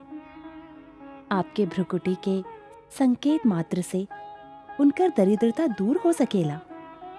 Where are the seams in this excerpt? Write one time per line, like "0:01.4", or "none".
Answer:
none